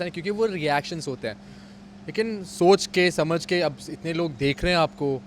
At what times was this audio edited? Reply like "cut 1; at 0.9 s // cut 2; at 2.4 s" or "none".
none